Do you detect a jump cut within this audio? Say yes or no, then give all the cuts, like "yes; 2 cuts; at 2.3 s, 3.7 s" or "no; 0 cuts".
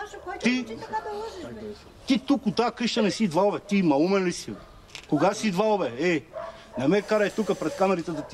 no; 0 cuts